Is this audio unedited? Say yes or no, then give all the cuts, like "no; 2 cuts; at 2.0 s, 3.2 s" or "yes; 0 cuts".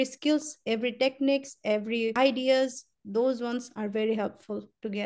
no; 1 cut; at 2.1 s